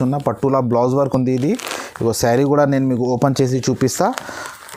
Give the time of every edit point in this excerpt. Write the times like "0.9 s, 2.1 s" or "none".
none